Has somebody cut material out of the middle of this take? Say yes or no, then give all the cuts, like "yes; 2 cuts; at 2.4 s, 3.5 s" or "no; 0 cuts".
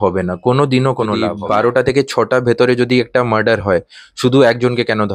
yes; 1 cut; at 1.2 s